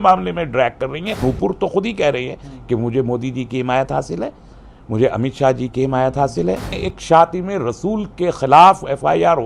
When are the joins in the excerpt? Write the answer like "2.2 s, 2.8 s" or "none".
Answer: 1.2 s, 6.8 s